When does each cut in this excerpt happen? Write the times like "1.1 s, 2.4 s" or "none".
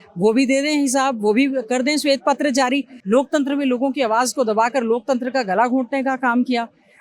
2.9 s